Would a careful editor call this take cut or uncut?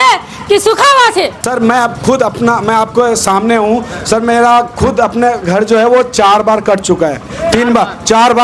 cut